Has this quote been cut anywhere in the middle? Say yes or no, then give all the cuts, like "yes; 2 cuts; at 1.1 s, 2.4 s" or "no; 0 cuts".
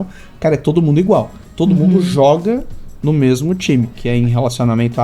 yes; 1 cut; at 4.0 s